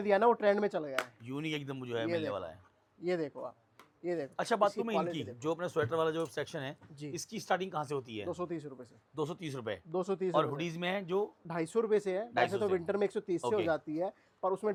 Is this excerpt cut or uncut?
uncut